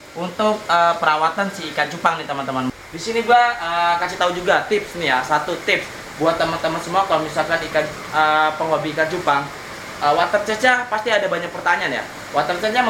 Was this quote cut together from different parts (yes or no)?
yes